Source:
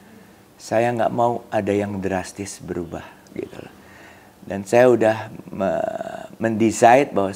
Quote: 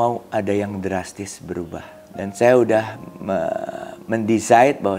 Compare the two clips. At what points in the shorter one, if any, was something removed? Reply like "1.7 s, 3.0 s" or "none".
2.0 s